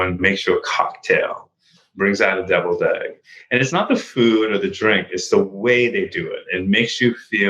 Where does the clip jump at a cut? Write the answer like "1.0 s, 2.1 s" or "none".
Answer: 6.5 s